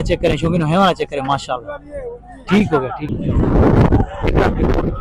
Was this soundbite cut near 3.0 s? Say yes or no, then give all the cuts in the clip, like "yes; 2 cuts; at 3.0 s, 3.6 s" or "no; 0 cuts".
yes; 1 cut; at 3.0 s